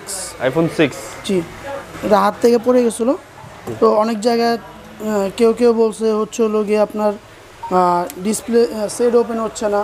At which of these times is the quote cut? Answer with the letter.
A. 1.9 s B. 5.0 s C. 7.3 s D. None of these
A